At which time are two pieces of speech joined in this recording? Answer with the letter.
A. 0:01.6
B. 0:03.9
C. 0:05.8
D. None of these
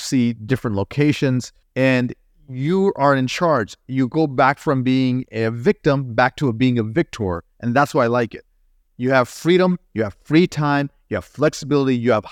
A